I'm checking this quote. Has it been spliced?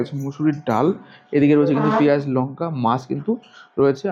no; 0 cuts

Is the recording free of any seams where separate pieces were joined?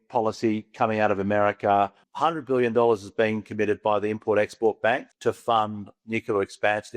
no; 2 cuts; at 2.0 s, 5.1 s

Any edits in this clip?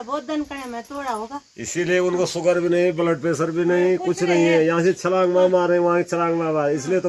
no; 0 cuts

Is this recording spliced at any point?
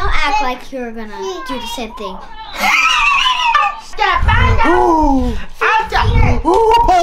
yes; 1 cut; at 3.9 s

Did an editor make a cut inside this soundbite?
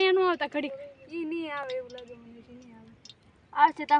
no; 0 cuts

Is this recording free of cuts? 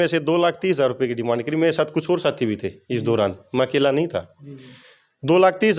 yes; 0 cuts

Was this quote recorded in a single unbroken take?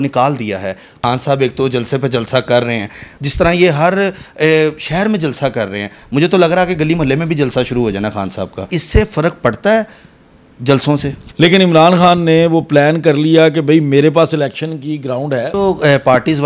no; 5 cuts; at 0.9 s, 3.1 s, 8.8 s, 11.2 s, 15.5 s

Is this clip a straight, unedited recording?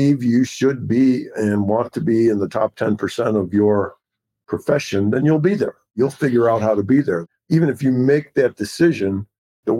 no; 1 cut; at 7.3 s

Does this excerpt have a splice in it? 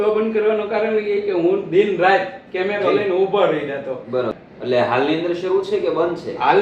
yes; 1 cut; at 4.3 s

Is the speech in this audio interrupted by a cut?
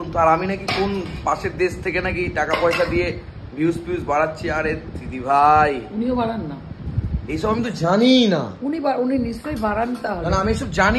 no; 0 cuts

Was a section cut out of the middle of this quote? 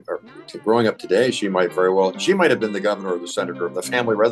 no; 0 cuts

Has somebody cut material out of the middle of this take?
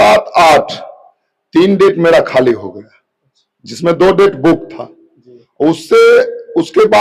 no; 0 cuts

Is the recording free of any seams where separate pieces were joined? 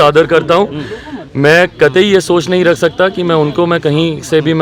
yes; 0 cuts

